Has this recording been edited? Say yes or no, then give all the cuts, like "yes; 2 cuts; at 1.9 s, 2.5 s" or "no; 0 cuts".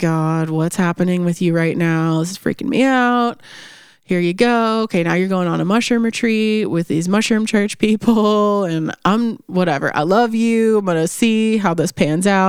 no; 0 cuts